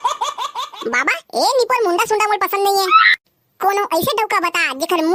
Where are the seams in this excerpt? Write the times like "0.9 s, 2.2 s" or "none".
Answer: none